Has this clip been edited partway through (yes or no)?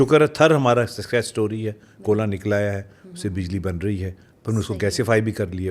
no